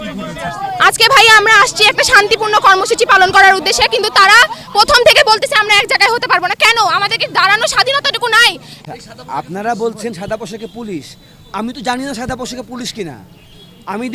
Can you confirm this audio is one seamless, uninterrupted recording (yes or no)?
no